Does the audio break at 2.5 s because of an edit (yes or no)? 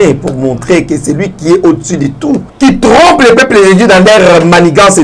yes